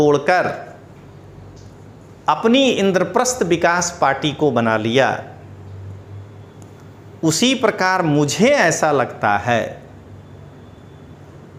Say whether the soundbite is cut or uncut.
uncut